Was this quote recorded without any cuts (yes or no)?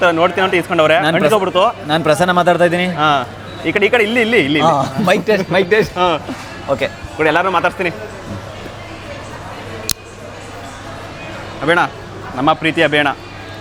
yes